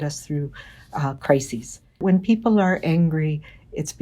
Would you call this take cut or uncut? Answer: cut